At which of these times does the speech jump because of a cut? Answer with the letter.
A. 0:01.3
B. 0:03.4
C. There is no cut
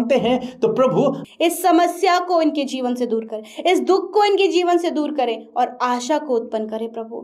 A